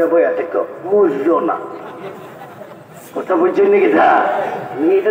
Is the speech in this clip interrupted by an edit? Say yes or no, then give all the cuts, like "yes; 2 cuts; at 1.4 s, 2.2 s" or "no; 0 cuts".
no; 0 cuts